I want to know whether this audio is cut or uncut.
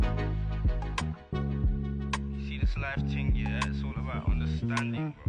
uncut